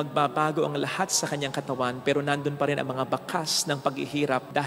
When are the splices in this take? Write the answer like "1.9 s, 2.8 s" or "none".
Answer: none